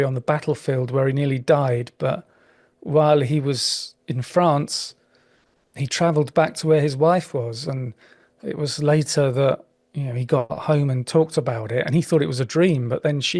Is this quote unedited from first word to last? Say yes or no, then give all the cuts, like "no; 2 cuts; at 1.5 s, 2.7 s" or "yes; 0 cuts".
yes; 0 cuts